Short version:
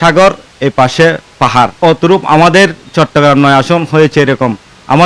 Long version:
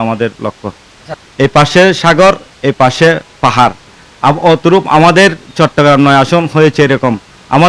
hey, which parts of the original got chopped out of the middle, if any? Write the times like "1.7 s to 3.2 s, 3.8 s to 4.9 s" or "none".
3.8 s to 4.4 s